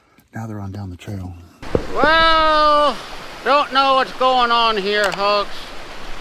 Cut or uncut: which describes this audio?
cut